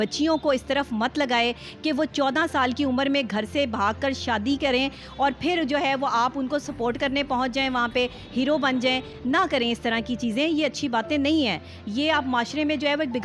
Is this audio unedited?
yes; 0 cuts

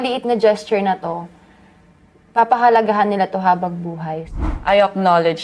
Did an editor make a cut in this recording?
yes; 1 cut; at 4.2 s

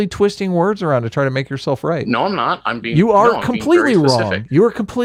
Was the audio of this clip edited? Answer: no; 0 cuts

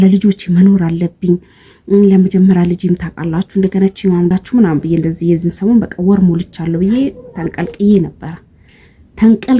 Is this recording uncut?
no; 1 cut; at 4.3 s

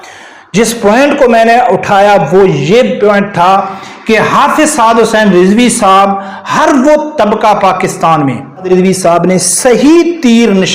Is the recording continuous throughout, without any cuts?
no; 1 cut; at 8.7 s

